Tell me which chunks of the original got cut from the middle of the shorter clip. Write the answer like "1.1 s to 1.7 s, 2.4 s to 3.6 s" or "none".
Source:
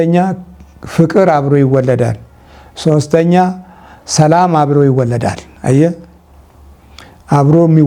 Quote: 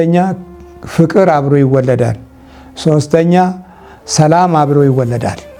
none